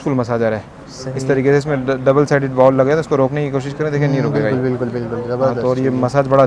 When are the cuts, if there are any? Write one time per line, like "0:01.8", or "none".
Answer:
none